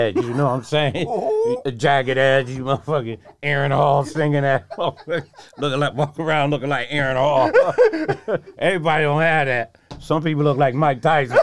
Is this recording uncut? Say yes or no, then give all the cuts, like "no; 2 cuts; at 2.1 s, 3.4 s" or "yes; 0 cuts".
yes; 0 cuts